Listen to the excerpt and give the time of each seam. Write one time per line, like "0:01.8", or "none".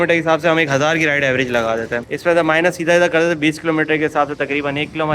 0:02.0